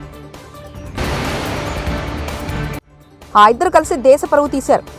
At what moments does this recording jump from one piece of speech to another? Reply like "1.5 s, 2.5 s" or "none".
0.9 s, 2.9 s